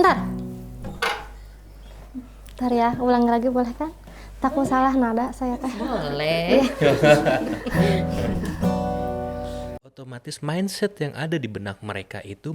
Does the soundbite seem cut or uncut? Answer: cut